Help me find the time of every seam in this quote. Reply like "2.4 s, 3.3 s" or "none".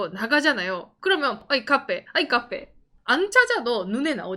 1.4 s